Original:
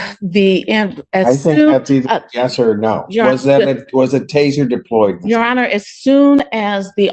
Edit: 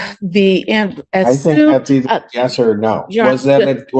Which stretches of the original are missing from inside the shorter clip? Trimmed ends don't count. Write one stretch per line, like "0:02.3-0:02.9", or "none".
none